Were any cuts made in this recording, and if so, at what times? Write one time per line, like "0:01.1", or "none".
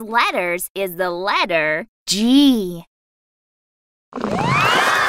0:01.9